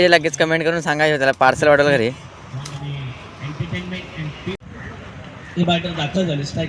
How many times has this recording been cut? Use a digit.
1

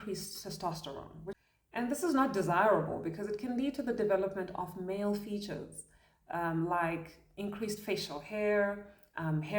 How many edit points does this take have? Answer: 1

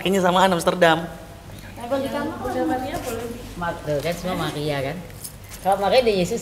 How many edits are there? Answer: 1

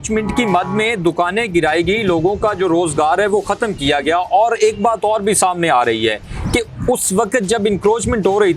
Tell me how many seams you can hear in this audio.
0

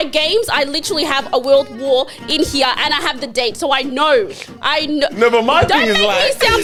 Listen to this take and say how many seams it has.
0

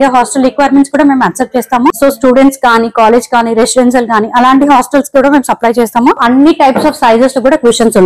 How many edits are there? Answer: 2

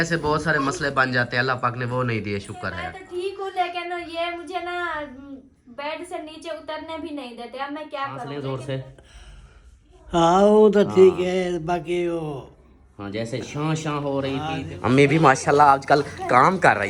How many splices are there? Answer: 3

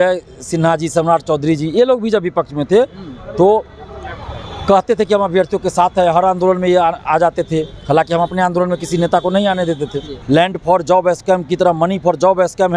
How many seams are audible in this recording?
1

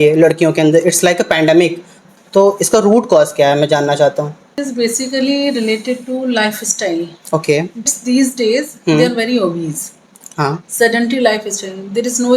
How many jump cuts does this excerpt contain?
3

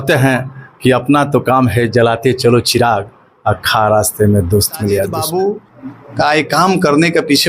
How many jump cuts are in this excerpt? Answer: 1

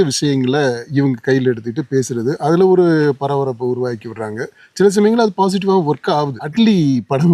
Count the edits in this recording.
1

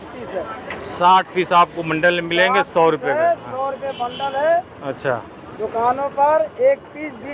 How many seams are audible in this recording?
0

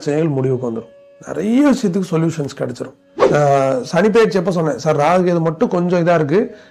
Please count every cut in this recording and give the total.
1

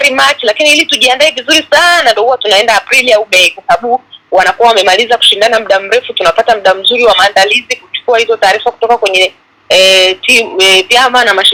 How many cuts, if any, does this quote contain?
0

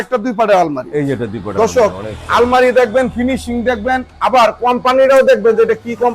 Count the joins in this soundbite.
0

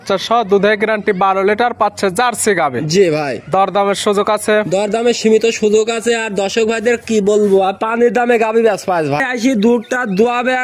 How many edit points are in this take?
1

